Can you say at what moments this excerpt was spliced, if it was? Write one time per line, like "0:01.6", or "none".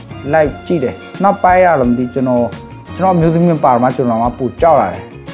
0:01.0